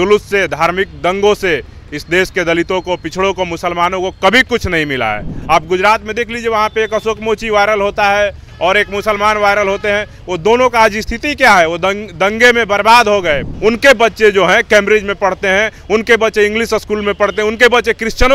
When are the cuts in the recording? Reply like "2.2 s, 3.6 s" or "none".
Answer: 5.3 s, 13.5 s